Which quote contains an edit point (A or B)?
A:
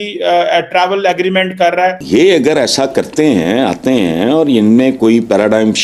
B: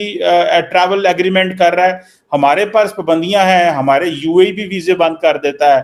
A